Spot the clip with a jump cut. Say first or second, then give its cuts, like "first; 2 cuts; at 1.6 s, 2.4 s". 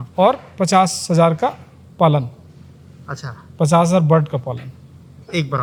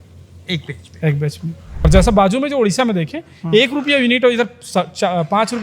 second; 1 cut; at 1.8 s